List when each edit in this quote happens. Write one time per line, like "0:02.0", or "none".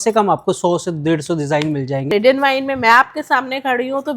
0:02.0